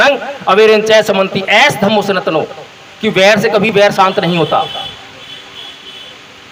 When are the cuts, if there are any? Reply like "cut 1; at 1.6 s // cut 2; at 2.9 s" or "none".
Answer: none